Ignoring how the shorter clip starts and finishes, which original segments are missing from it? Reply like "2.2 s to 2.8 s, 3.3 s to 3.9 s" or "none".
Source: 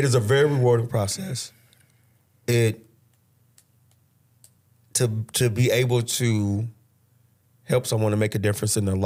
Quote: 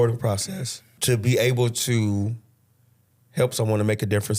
1.6 s to 5.2 s

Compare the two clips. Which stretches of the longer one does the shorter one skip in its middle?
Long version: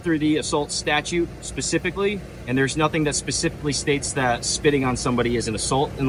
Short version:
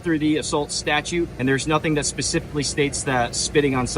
1.3 s to 2.4 s

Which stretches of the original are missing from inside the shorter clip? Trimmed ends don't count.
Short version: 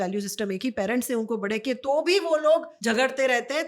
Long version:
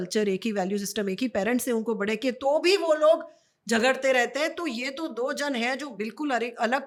3.3 s to 3.6 s

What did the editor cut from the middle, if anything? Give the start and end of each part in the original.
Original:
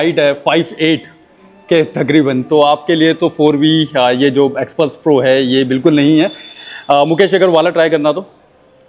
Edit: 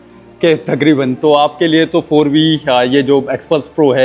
none

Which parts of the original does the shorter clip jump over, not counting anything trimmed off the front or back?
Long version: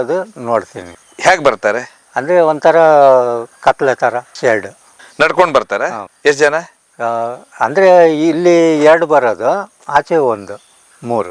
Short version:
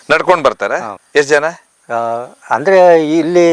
none

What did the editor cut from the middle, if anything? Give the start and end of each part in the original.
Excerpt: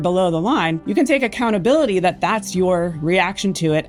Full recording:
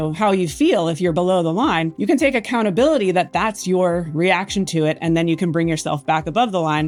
none

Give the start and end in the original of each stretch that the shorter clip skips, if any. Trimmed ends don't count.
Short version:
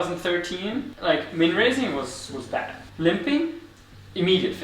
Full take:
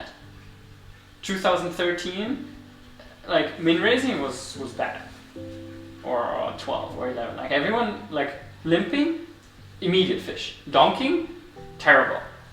2.5 s to 3.2 s, 5.1 s to 8.5 s

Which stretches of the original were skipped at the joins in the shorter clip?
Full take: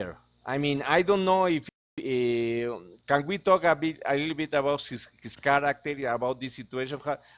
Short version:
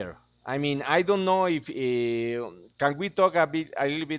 1.7 s to 2.0 s

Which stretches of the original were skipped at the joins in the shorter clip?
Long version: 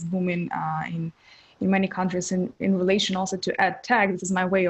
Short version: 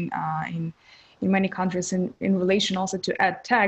none

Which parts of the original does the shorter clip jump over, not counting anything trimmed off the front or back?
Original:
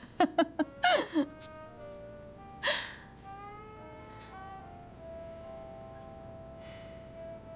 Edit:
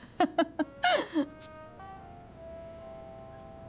1.8 s to 4.4 s

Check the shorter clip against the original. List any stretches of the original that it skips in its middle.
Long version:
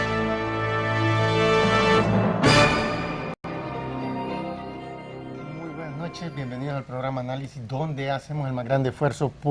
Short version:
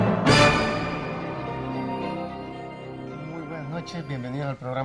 3.3 s to 3.4 s

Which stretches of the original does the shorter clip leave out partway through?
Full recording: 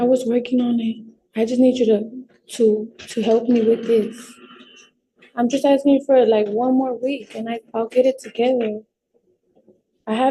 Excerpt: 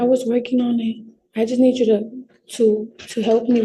none

